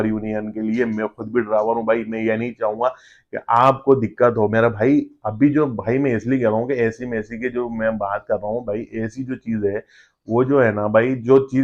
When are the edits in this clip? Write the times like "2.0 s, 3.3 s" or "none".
none